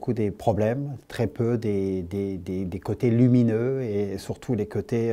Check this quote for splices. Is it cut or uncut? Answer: uncut